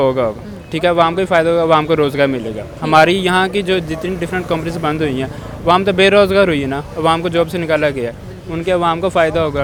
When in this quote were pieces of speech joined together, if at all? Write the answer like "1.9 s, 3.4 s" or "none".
none